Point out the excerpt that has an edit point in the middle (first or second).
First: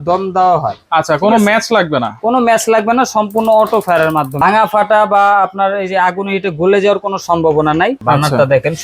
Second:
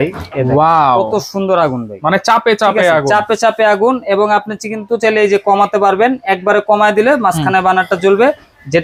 first